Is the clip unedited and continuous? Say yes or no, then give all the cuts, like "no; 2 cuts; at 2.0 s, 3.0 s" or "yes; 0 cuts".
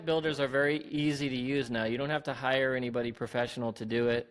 yes; 0 cuts